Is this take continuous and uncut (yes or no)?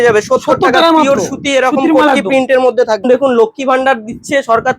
no